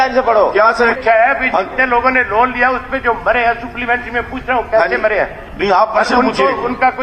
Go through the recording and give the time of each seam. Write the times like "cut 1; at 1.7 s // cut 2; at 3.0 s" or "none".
cut 1; at 0.9 s